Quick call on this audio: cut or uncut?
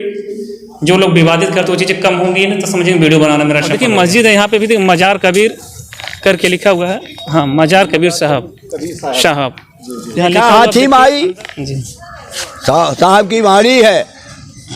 cut